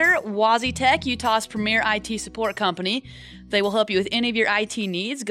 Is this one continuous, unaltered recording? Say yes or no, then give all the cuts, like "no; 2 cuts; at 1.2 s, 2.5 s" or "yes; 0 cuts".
yes; 0 cuts